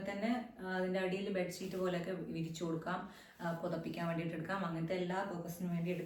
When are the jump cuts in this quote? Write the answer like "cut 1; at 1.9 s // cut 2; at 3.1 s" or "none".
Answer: none